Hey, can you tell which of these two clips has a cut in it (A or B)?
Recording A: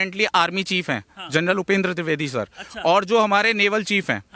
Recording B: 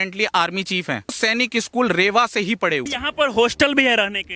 B